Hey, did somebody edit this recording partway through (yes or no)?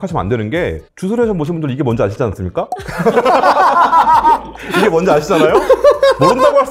no